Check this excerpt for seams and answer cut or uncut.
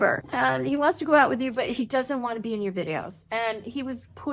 uncut